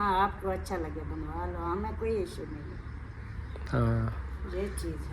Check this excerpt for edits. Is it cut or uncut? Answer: uncut